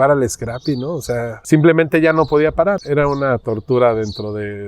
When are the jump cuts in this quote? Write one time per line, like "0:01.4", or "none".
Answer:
0:01.3
0:02.8